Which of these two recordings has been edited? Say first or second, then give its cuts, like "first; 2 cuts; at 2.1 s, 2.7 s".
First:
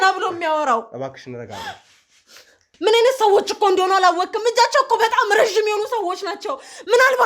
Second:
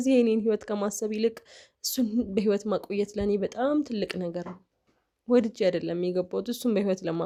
first; 1 cut; at 2.7 s